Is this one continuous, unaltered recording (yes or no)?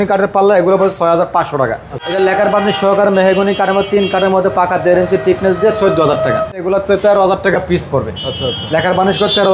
no